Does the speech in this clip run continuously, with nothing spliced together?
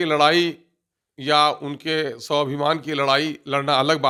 yes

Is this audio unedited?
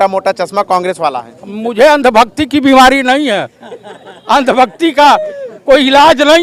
yes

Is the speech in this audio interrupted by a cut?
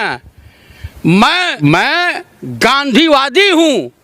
yes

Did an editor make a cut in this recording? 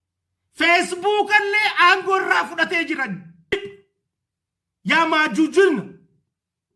yes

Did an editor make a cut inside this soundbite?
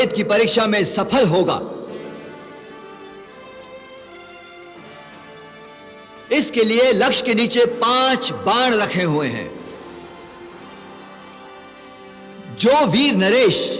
no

